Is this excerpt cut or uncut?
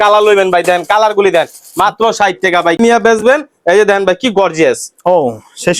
cut